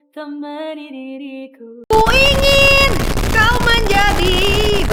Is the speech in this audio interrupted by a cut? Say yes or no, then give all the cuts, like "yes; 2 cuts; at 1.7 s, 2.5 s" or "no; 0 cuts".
no; 0 cuts